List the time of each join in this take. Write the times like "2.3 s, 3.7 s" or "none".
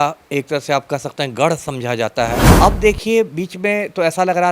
2.5 s